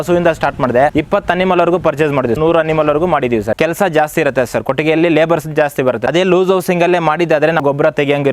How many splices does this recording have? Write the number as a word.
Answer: five